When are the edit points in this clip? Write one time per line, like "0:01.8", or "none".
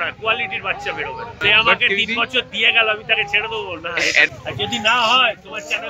0:01.3
0:04.3